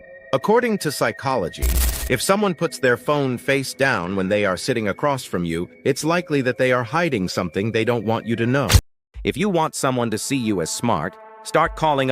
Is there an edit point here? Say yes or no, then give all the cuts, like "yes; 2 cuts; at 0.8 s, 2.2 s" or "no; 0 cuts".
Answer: yes; 1 cut; at 8.9 s